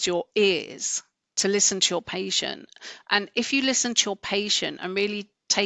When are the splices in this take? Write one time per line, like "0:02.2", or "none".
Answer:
none